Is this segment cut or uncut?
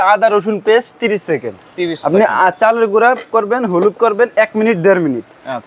uncut